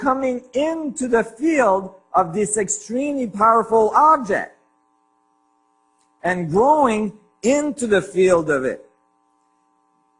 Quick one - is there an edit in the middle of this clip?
yes; 1 cut; at 3.3 s

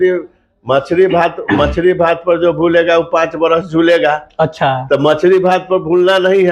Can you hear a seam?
no; 0 cuts

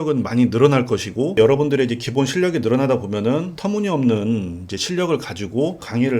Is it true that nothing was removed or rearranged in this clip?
yes; 0 cuts

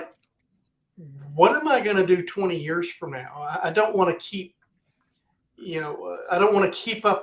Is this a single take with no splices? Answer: yes; 0 cuts

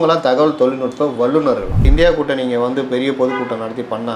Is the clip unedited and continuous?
no; 1 cut; at 1.8 s

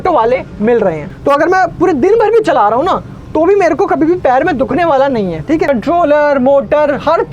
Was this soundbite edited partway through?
yes; 2 cuts; at 1.1 s, 5.7 s

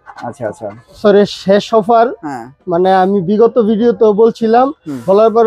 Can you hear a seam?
yes; 1 cut; at 1.0 s

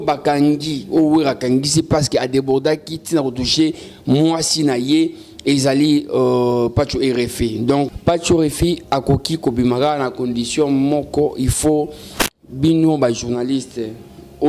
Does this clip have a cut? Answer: yes; 1 cut; at 7.9 s

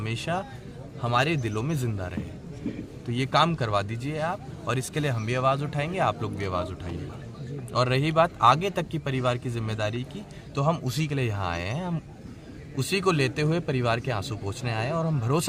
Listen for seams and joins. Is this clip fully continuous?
yes; 0 cuts

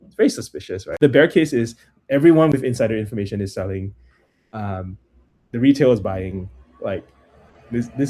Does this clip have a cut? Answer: yes; 2 cuts; at 0.8 s, 2.5 s

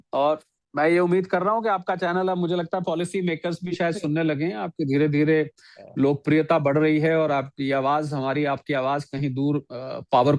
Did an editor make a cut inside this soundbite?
no; 0 cuts

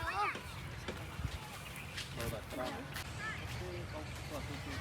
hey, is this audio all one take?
no; 1 cut; at 3.1 s

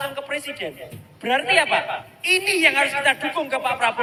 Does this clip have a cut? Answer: no; 0 cuts

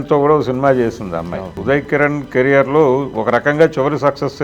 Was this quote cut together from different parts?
yes; 1 cut; at 1.5 s

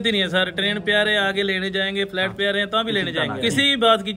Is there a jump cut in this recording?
yes; 1 cut; at 3.2 s

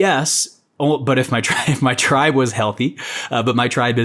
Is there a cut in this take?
no; 0 cuts

